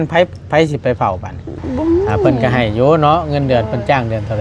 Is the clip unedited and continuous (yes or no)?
no